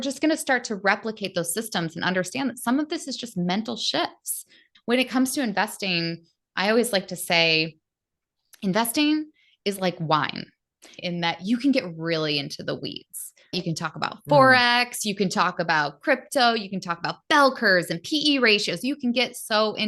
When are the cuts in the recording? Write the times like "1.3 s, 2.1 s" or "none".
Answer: 4.7 s, 10.9 s, 13.5 s